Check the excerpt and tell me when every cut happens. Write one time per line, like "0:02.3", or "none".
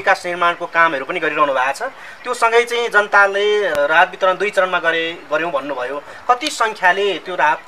0:03.7